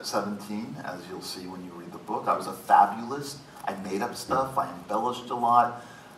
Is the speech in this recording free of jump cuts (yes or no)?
yes